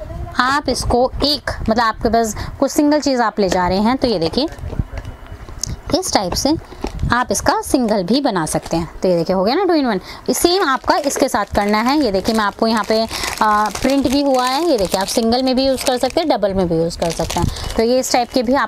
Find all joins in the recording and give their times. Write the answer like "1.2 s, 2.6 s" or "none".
none